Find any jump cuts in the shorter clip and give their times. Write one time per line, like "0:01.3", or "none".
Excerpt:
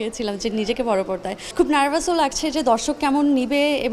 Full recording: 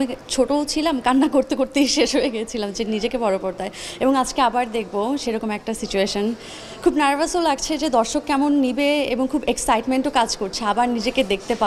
0:01.4